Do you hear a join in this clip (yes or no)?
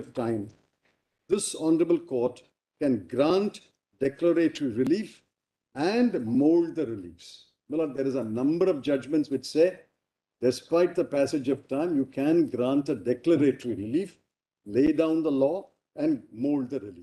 no